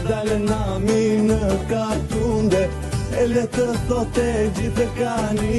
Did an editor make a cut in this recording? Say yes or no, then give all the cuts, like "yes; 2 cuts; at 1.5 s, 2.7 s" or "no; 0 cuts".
no; 0 cuts